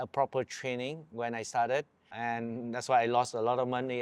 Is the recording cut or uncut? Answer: cut